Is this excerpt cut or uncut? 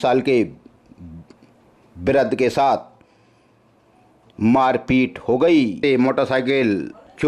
cut